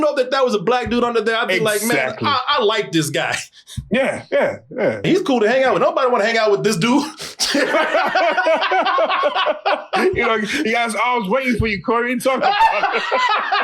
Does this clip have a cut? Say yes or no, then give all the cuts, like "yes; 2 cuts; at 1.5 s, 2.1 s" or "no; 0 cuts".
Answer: yes; 1 cut; at 5.1 s